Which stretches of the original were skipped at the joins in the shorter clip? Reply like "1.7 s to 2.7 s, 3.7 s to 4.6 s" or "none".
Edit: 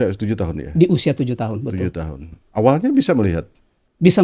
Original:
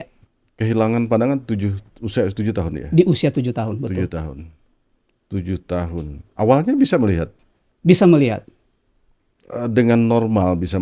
4.5 s to 6.2 s